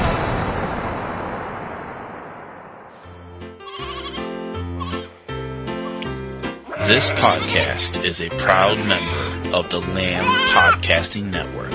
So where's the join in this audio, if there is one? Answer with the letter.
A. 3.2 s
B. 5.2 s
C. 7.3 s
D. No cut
A